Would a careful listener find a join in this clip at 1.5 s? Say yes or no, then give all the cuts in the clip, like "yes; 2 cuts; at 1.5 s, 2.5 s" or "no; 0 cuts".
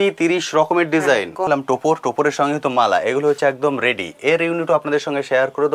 yes; 1 cut; at 1.5 s